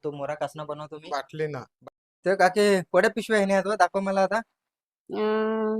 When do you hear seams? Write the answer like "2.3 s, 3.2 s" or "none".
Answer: 1.7 s